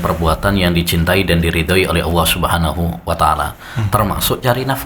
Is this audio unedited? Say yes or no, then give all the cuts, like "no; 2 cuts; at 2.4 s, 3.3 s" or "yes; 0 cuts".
yes; 0 cuts